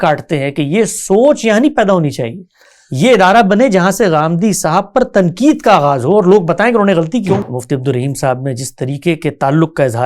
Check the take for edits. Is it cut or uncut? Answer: cut